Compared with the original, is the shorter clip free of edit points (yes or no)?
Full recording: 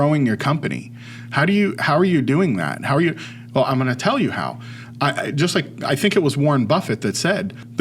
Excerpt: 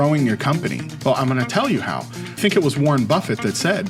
no